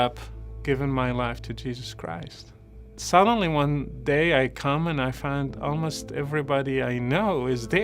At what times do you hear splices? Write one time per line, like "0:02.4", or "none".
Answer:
0:02.8